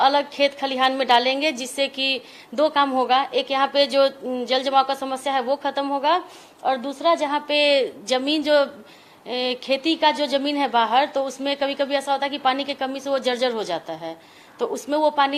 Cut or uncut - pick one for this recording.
uncut